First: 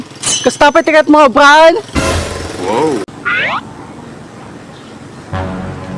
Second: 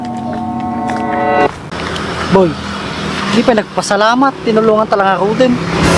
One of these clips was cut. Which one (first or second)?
first